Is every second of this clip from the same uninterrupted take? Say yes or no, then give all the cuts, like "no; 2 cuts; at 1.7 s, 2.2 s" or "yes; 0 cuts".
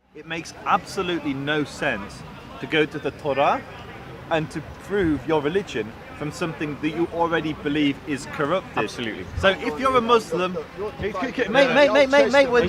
yes; 0 cuts